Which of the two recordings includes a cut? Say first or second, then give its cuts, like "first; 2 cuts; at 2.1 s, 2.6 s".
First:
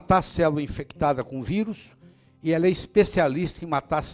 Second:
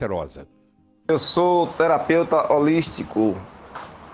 second; 1 cut; at 1.1 s